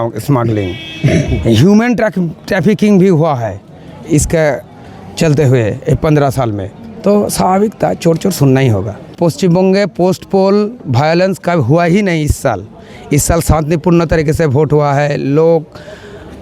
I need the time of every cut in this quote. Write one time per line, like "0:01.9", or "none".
0:09.1